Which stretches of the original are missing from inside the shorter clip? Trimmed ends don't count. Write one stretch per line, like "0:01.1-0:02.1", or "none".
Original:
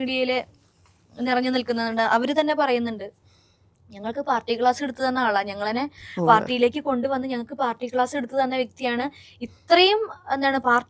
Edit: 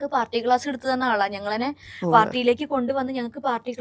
none